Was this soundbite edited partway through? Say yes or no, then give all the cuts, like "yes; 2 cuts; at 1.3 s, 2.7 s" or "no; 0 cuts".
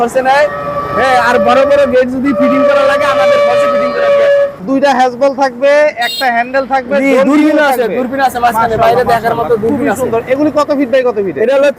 yes; 1 cut; at 4.6 s